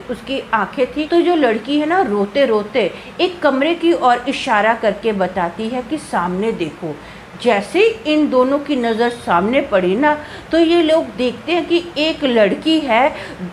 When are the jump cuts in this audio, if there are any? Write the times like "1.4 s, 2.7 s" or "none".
1.0 s